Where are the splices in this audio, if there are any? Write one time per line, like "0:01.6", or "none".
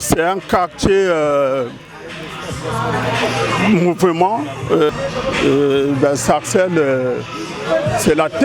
0:04.9